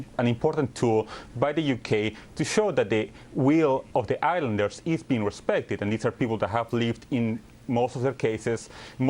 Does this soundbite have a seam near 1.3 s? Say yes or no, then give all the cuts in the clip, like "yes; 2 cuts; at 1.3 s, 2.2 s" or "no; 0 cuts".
no; 1 cut; at 6.4 s